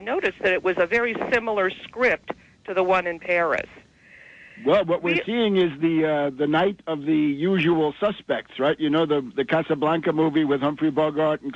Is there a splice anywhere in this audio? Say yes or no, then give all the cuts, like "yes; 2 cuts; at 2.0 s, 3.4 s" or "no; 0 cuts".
no; 0 cuts